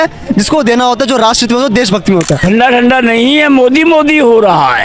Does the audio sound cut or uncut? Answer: cut